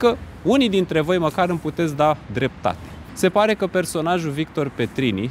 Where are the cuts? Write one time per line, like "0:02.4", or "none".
0:03.0